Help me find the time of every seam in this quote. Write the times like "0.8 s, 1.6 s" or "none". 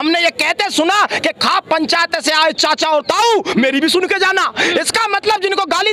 none